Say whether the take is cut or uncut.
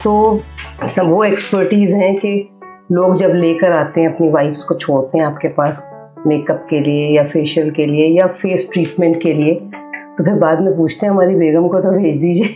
uncut